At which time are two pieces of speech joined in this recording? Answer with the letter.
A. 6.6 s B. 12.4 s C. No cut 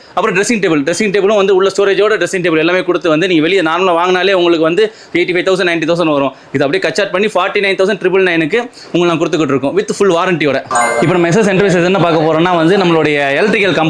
C